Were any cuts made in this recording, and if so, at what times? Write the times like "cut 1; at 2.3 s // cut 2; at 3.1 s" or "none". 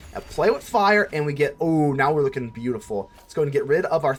none